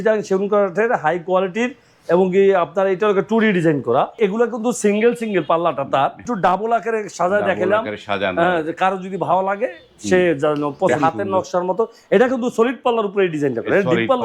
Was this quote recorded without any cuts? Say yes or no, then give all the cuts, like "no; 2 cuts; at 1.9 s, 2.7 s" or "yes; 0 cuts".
no; 3 cuts; at 4.2 s, 6.3 s, 10.9 s